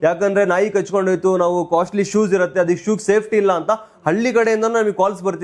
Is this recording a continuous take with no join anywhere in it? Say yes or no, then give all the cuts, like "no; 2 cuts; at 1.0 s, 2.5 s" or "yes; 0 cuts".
yes; 0 cuts